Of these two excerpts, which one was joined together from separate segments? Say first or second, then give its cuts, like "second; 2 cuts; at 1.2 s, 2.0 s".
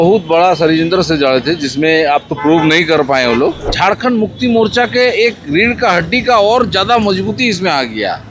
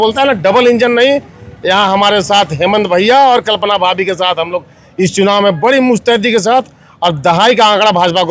first; 1 cut; at 3.7 s